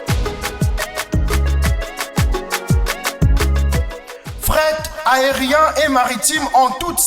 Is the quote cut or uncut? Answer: cut